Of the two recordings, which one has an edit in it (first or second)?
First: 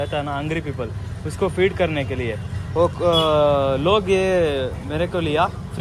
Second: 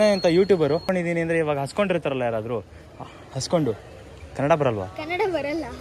second